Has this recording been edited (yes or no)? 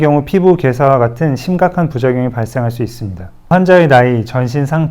yes